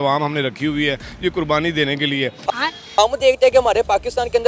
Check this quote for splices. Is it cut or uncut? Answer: cut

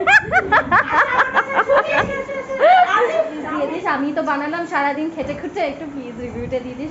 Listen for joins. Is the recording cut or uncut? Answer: cut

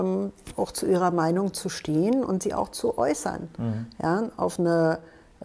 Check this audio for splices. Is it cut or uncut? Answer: uncut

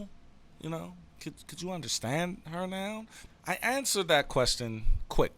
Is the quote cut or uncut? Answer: cut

